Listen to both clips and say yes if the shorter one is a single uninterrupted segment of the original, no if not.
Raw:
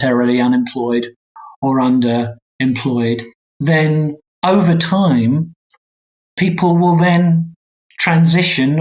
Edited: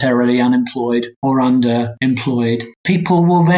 no